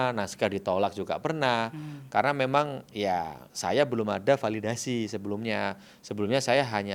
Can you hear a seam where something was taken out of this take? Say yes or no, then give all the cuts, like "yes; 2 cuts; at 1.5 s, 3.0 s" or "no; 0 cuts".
no; 0 cuts